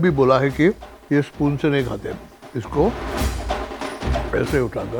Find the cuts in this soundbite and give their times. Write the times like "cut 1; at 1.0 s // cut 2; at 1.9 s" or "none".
none